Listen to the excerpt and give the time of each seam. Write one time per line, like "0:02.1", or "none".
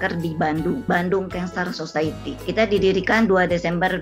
0:00.8
0:02.3